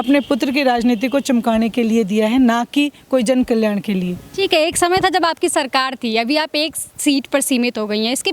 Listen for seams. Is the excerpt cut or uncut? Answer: uncut